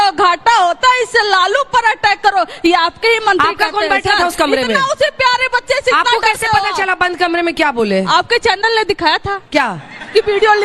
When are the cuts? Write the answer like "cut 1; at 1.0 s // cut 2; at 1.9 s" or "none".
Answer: cut 1; at 2.5 s